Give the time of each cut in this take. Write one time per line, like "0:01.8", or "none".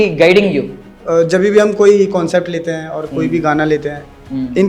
0:01.0